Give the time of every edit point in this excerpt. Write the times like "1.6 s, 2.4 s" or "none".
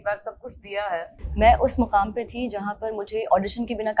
1.2 s